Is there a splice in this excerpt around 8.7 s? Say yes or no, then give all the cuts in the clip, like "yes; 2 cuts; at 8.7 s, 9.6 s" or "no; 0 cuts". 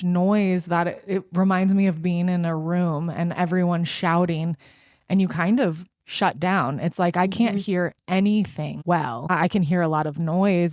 yes; 1 cut; at 8.7 s